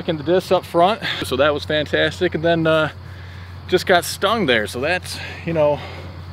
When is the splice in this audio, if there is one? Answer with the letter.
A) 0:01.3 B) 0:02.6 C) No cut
A